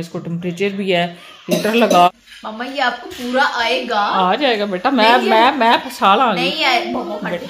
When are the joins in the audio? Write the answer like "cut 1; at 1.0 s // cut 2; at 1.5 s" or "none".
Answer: cut 1; at 2.1 s